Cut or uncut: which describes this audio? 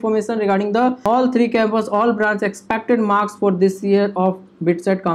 cut